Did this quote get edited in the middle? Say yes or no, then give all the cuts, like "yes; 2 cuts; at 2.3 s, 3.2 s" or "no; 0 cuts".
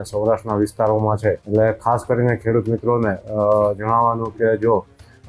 yes; 1 cut; at 1.4 s